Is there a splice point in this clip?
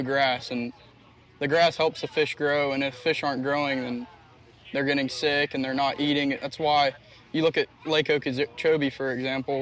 no; 0 cuts

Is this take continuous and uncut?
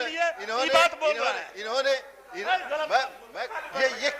no; 1 cut; at 3.2 s

